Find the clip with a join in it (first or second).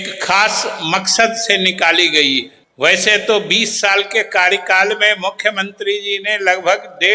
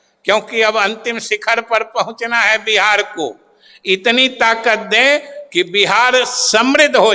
first